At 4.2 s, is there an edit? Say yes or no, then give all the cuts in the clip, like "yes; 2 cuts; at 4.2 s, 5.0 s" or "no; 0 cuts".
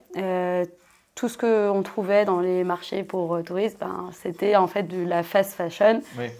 no; 0 cuts